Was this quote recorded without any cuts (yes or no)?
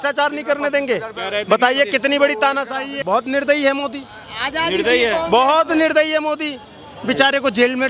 no